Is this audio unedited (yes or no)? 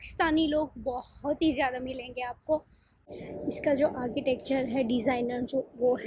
no